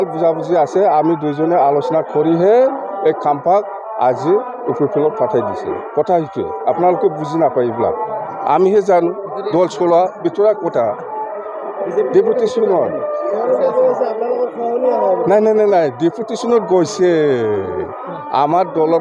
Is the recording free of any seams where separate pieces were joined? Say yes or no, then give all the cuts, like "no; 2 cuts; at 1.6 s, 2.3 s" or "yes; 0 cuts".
yes; 0 cuts